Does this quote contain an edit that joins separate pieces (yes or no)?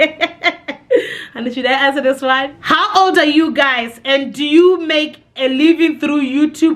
yes